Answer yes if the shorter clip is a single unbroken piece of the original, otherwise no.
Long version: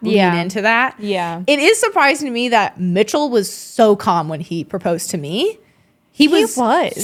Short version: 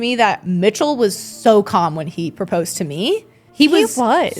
no